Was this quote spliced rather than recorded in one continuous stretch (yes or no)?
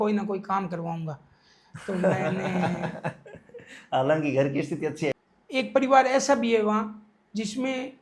yes